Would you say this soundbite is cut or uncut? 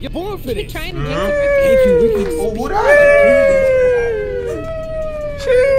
uncut